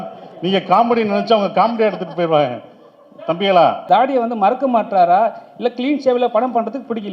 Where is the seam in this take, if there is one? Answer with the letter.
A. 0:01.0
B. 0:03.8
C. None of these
B